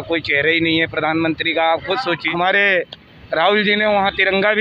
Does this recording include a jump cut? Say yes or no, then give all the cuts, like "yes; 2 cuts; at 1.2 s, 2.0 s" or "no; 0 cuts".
yes; 1 cut; at 2.2 s